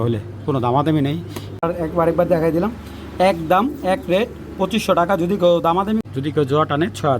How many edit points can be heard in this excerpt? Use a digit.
2